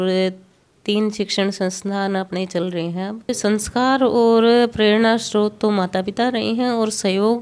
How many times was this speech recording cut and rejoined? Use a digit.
1